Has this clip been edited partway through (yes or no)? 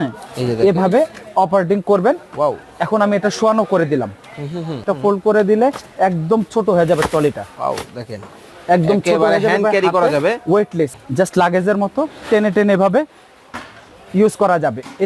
yes